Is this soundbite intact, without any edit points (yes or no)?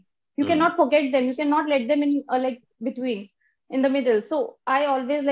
yes